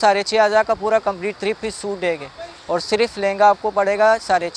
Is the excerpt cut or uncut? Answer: uncut